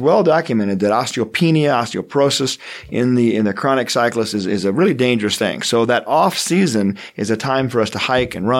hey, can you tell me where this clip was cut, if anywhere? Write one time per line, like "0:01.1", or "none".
none